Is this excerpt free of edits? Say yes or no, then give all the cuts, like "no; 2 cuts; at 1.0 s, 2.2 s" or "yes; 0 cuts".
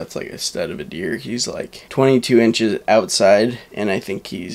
no; 2 cuts; at 1.8 s, 3.6 s